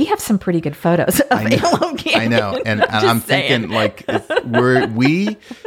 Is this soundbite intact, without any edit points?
yes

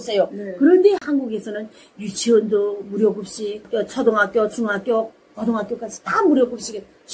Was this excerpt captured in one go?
yes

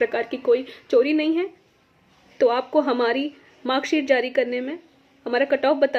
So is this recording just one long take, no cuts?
yes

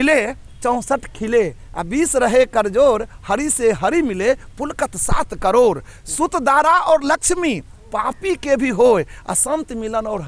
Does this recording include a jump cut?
no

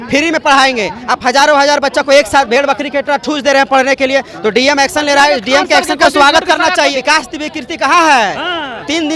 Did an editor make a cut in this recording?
yes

